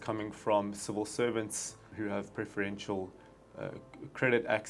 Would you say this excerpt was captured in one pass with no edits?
no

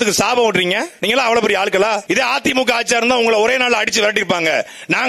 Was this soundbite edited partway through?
yes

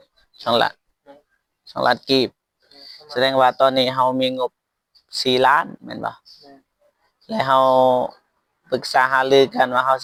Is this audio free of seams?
yes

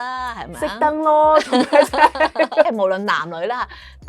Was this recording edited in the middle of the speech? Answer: yes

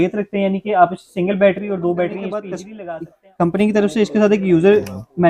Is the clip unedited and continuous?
no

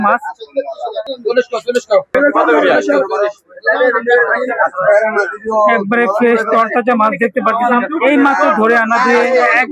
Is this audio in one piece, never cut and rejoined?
yes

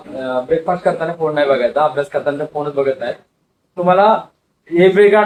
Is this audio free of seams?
yes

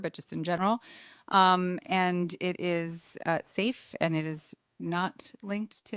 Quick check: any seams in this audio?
no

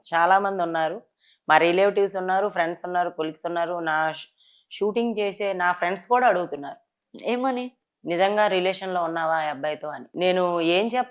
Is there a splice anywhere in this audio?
yes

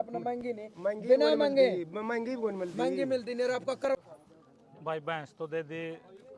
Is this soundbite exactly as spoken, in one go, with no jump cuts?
no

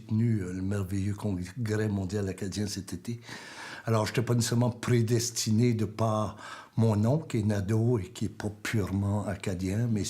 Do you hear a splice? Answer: yes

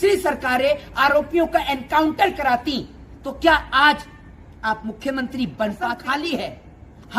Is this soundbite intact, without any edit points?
no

